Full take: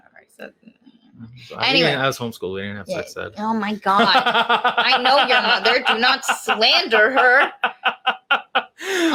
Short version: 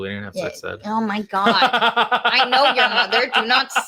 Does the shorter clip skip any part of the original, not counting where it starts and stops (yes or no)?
no